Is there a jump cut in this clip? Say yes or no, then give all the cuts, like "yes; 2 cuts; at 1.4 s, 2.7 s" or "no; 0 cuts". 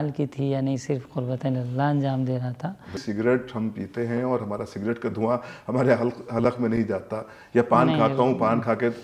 yes; 1 cut; at 3.0 s